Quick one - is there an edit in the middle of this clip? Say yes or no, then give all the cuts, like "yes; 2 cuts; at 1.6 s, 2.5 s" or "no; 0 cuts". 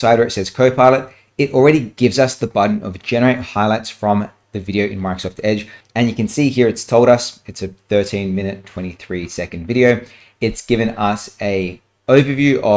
yes; 1 cut; at 5.8 s